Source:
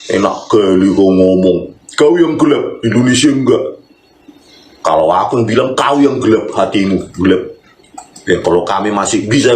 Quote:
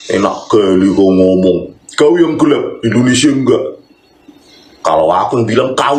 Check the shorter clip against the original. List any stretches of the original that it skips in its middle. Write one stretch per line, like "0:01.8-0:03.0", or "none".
none